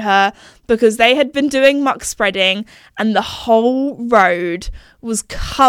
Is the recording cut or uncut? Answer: uncut